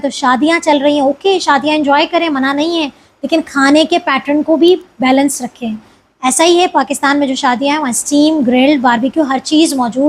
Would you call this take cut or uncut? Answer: uncut